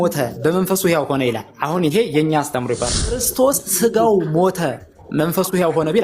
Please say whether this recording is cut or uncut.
cut